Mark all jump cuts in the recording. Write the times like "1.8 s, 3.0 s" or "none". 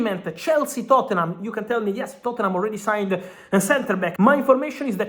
4.1 s